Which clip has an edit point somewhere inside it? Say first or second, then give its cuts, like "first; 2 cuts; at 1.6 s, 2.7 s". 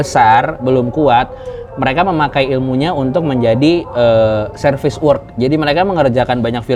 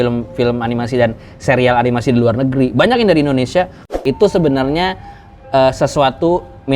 second; 1 cut; at 4.0 s